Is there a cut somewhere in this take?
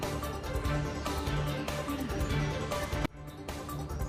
no; 0 cuts

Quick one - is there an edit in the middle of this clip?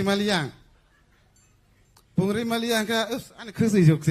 yes; 1 cut; at 2.9 s

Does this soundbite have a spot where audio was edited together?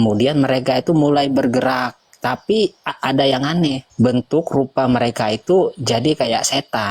yes; 1 cut; at 3.8 s

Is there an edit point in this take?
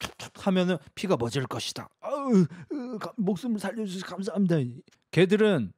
no; 0 cuts

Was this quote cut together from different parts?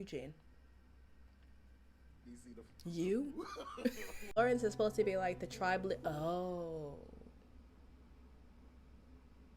yes; 1 cut; at 4.3 s

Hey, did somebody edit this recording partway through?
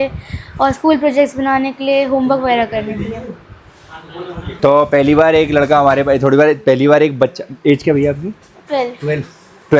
no; 0 cuts

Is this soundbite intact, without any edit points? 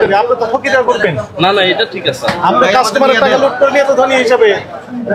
yes; 0 cuts

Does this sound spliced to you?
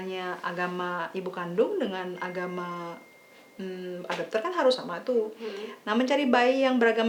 no; 0 cuts

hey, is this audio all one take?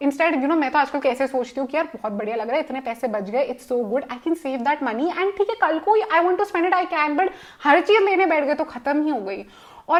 yes; 0 cuts

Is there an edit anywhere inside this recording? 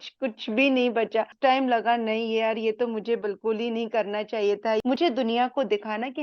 yes; 2 cuts; at 1.3 s, 4.9 s

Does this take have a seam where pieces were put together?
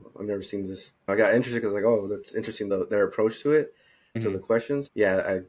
yes; 3 cuts; at 1.1 s, 2.7 s, 4.3 s

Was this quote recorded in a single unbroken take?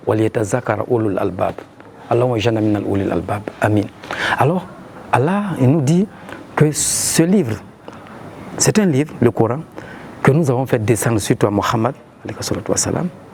yes; 0 cuts

